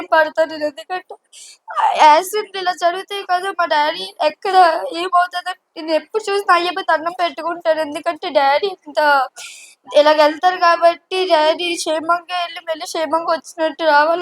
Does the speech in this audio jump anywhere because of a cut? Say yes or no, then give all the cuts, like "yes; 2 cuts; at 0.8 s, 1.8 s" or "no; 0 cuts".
no; 0 cuts